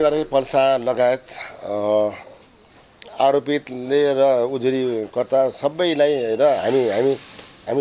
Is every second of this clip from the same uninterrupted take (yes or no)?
yes